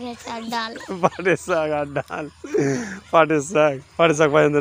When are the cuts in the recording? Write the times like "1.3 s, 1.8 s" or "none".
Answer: none

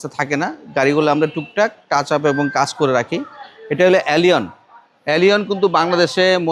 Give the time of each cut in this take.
none

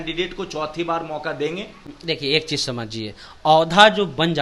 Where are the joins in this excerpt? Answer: none

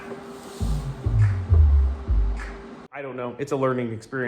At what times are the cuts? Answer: 3.1 s

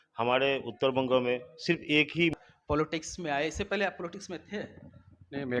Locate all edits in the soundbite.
2.3 s

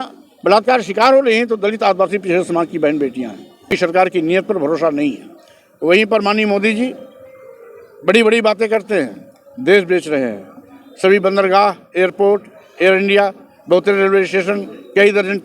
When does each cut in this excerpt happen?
3.7 s

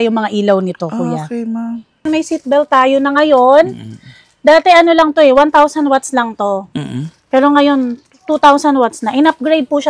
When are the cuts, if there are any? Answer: 2.0 s

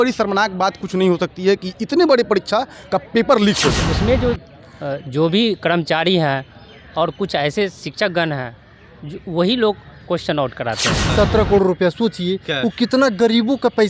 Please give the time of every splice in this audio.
3.8 s, 11.0 s

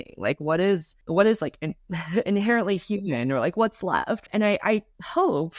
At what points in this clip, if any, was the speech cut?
1.0 s, 4.3 s

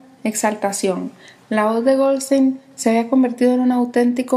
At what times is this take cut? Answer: 1.0 s

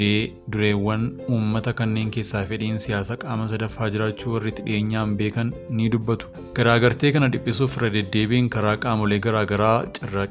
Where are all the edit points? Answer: 6.0 s

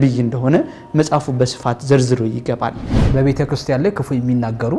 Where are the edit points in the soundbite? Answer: 2.7 s

